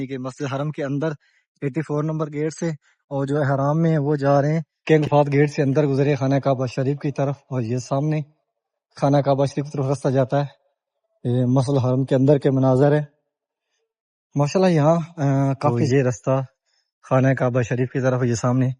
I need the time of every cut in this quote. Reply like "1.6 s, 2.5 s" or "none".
4.7 s, 15.8 s